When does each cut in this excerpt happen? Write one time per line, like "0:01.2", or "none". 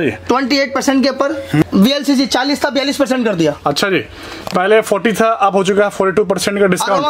0:01.6